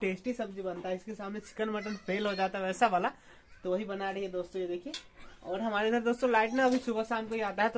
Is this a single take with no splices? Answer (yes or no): yes